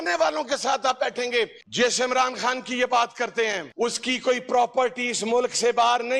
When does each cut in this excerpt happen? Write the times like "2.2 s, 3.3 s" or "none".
1.6 s